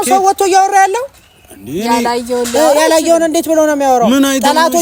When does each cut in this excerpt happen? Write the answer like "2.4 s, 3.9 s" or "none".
none